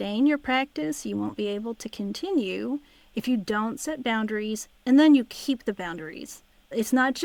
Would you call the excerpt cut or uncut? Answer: uncut